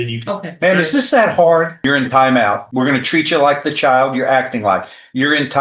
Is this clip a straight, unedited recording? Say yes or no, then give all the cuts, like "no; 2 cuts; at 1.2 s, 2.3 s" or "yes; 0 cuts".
no; 2 cuts; at 1.7 s, 2.6 s